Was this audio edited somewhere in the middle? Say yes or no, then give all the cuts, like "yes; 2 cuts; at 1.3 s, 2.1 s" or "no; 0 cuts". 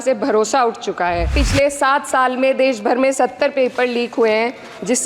yes; 1 cut; at 1.3 s